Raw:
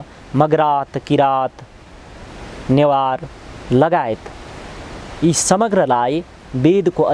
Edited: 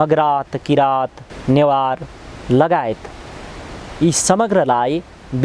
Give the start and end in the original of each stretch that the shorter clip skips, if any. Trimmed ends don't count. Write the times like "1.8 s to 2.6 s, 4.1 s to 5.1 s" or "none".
1.7 s to 2.5 s